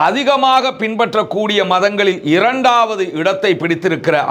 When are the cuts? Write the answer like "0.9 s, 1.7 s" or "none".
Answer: none

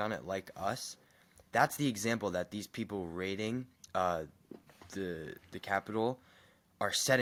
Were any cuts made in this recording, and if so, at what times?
none

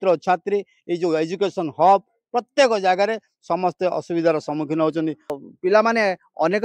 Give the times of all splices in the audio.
5.4 s

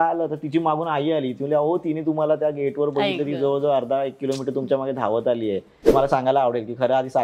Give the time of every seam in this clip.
5.9 s

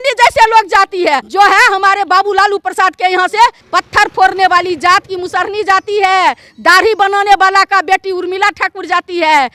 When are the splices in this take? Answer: 1.3 s, 3.6 s

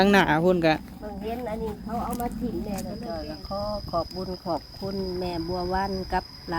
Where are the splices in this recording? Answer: 3.0 s

